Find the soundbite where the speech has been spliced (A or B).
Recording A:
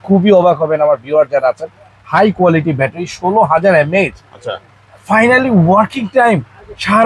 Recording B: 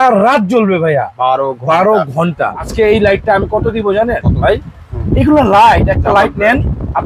B